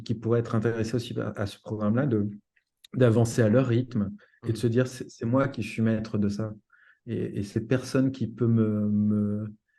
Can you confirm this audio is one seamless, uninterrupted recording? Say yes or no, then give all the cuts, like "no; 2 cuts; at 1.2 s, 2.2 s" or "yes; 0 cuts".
yes; 0 cuts